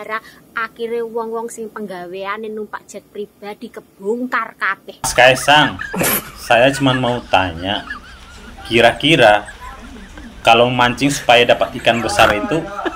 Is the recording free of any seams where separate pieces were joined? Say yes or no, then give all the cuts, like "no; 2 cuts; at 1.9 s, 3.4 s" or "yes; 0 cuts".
no; 1 cut; at 5.1 s